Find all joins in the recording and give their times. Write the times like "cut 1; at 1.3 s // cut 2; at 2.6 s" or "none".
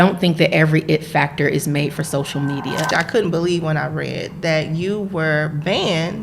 cut 1; at 2.9 s